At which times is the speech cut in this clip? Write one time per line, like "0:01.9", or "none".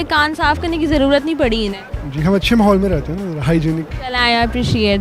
none